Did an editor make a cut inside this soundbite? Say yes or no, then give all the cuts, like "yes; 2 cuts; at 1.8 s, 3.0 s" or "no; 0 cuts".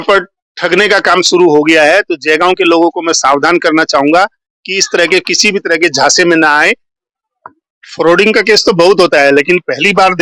yes; 1 cut; at 7.0 s